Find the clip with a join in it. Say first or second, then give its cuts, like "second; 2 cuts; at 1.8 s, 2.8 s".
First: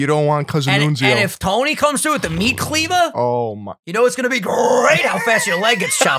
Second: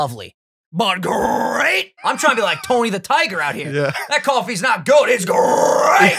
second; 1 cut; at 1.9 s